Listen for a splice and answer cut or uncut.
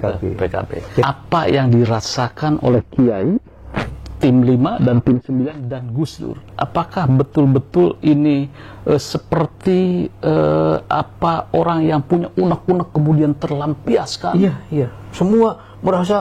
cut